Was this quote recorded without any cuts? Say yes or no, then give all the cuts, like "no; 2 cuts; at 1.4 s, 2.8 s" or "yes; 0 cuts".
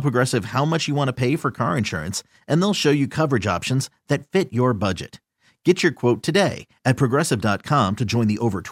yes; 0 cuts